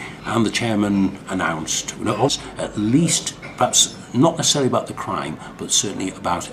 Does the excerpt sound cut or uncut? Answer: uncut